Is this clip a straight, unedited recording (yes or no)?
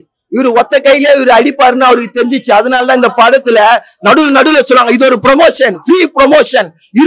yes